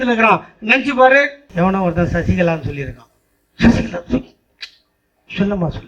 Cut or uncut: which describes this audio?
cut